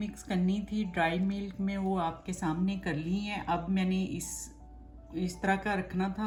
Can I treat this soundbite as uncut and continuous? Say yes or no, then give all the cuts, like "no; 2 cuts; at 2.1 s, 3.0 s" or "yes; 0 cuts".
yes; 0 cuts